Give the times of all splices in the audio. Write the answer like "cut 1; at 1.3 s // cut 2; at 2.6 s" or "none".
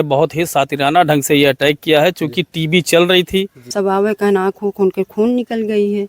cut 1; at 3.7 s